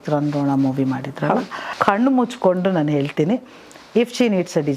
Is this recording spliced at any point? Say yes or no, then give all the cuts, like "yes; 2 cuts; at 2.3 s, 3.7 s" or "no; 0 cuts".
yes; 1 cut; at 1.6 s